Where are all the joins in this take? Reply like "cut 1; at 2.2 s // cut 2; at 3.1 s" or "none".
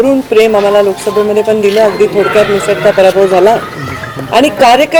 none